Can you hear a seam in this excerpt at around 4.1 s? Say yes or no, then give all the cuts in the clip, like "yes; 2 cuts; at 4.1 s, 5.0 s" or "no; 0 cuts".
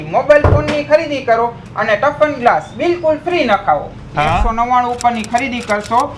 yes; 1 cut; at 4.1 s